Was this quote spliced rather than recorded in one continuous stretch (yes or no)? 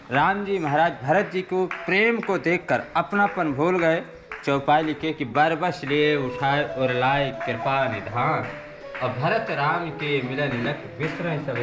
no